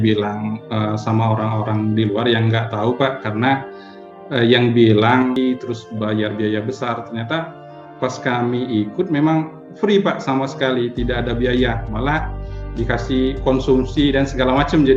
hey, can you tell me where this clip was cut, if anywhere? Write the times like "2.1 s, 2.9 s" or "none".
5.4 s